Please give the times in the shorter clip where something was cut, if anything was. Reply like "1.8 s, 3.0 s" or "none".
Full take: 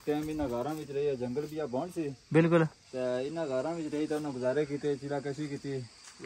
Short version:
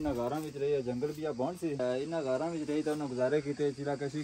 1.8 s